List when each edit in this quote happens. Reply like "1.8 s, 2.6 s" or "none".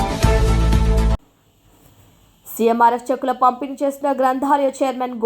1.2 s